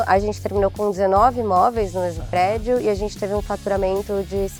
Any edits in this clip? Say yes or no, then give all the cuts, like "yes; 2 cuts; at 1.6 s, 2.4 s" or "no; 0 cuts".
no; 0 cuts